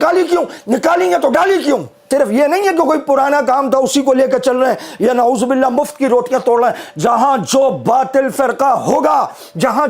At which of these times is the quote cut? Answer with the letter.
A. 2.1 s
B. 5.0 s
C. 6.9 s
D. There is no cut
A